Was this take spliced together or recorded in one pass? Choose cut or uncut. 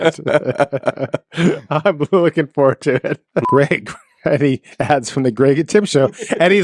cut